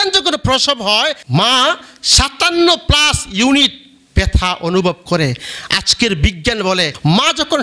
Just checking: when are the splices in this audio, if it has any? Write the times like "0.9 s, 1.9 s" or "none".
1.2 s